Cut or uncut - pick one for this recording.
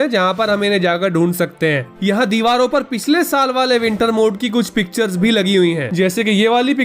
cut